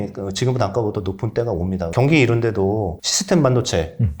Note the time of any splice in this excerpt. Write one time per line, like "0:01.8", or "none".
0:01.9
0:03.1